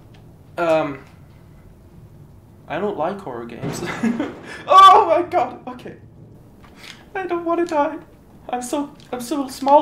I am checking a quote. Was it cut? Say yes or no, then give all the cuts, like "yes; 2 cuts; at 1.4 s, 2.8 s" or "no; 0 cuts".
no; 0 cuts